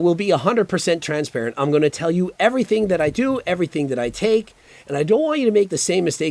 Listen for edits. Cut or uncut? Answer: uncut